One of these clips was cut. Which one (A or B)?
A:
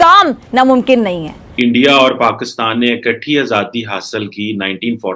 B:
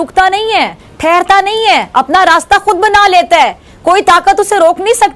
A